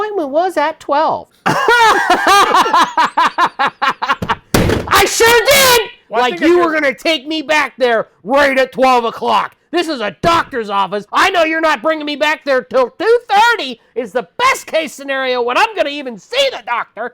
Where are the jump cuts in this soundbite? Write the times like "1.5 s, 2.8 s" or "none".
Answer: 1.3 s, 6.0 s, 11.0 s